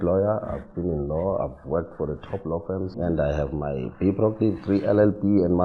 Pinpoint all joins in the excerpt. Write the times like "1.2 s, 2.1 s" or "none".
2.9 s